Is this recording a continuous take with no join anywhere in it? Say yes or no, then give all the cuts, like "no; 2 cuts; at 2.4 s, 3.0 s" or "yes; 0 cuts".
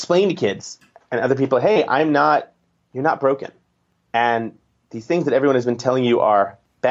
yes; 0 cuts